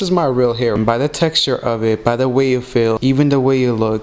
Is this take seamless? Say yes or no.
no